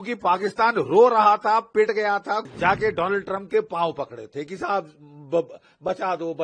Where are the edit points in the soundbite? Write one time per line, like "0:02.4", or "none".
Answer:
0:02.4